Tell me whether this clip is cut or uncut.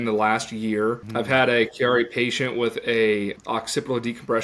cut